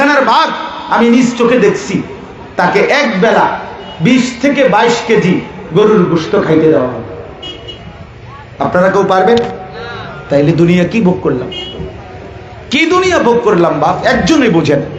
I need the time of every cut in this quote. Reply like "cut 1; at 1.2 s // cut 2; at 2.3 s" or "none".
none

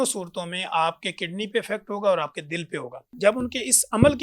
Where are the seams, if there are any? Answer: cut 1; at 3.0 s

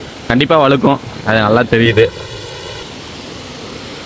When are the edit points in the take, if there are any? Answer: none

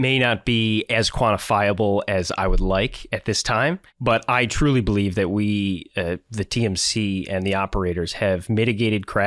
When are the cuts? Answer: cut 1; at 3.9 s

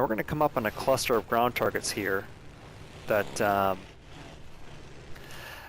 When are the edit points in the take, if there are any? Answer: cut 1; at 3.9 s

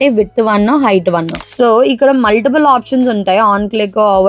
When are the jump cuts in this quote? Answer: cut 1; at 1.4 s

